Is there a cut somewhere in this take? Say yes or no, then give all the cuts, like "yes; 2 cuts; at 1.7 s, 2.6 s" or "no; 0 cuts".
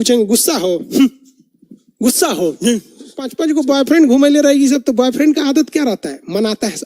yes; 1 cut; at 3.4 s